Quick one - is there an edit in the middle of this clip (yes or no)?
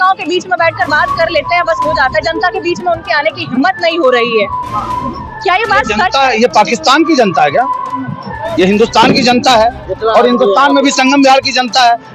no